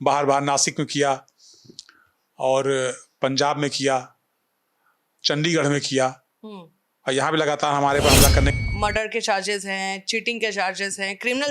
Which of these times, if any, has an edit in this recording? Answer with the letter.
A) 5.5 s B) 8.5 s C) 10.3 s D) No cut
B